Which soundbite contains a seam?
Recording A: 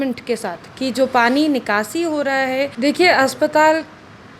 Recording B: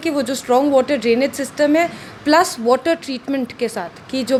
A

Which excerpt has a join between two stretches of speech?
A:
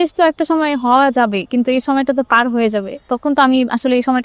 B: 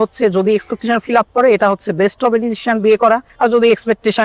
B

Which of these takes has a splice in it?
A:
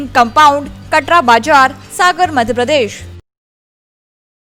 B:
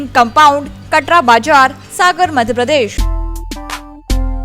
B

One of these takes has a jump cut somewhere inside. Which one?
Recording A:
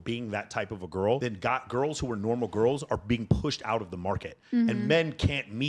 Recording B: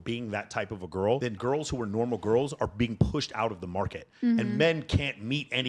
B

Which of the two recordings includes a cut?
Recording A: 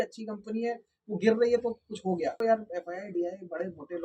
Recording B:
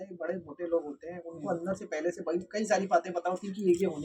A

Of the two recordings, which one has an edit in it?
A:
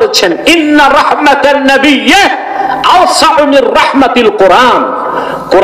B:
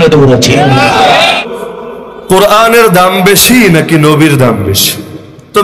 B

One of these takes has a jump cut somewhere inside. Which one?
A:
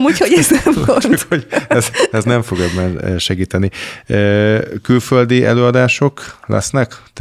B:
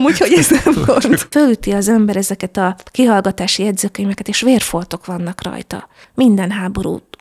B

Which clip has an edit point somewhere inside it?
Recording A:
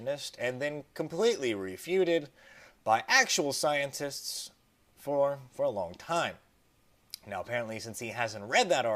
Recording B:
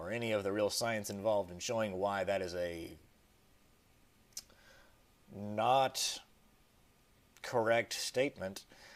A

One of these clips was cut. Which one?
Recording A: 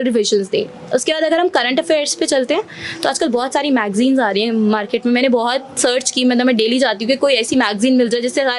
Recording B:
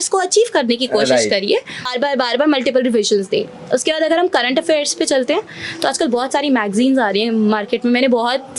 B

